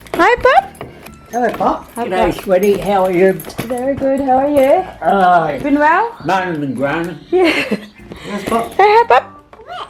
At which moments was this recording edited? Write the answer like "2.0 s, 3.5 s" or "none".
none